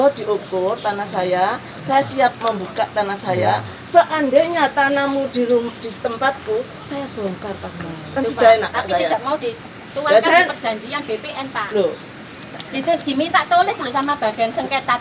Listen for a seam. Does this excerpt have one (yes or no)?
no